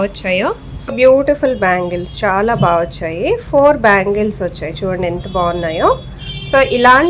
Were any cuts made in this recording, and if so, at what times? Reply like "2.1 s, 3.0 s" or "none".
0.9 s